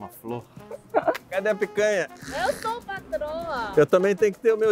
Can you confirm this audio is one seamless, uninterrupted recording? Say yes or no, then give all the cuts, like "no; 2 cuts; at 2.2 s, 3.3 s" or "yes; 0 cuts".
no; 3 cuts; at 1.2 s, 2.2 s, 3.7 s